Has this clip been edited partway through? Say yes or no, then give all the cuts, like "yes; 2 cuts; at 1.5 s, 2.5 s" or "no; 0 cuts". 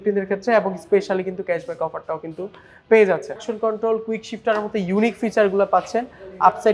yes; 1 cut; at 3.5 s